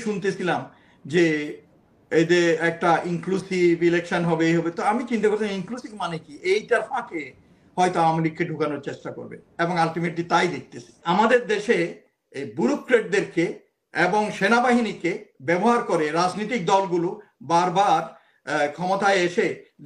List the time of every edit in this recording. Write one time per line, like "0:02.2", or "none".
0:11.0